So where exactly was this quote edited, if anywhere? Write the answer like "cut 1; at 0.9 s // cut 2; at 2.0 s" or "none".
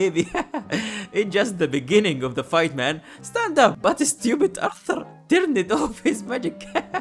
cut 1; at 3.8 s